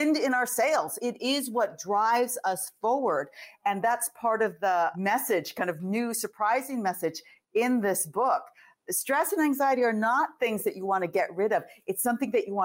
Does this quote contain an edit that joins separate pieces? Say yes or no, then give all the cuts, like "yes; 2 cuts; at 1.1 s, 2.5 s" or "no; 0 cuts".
yes; 2 cuts; at 0.9 s, 4.9 s